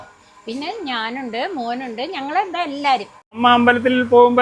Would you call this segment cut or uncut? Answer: cut